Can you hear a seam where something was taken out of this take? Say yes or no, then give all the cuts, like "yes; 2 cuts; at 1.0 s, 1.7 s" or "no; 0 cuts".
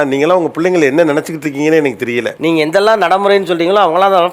no; 0 cuts